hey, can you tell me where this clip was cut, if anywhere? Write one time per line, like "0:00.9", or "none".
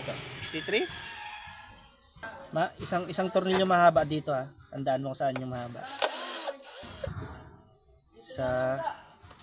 0:02.2
0:06.8

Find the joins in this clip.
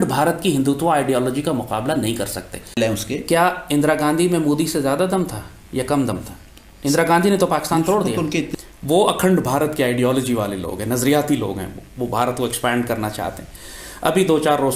0:02.8
0:08.5

